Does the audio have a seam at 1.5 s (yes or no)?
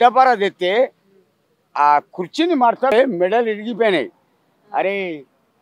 no